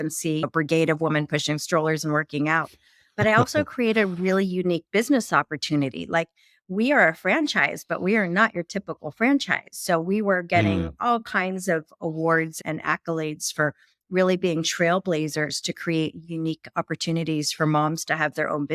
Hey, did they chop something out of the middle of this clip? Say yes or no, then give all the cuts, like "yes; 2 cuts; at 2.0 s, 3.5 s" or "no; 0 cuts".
no; 0 cuts